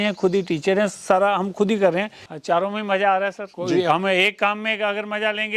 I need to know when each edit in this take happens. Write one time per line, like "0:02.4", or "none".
0:02.3
0:03.5